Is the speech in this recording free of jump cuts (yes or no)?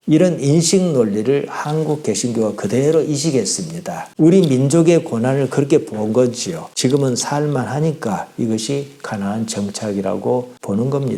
yes